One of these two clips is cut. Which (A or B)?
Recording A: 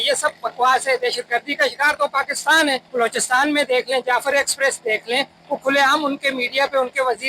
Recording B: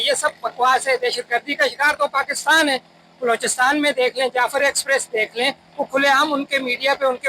A